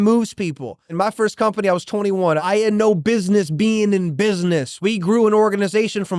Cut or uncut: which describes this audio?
cut